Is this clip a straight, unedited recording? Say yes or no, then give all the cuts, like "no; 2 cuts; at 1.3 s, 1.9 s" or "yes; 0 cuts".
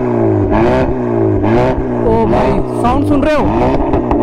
yes; 0 cuts